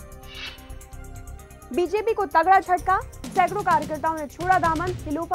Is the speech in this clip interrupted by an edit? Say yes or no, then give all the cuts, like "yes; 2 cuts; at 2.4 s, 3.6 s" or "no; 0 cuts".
no; 0 cuts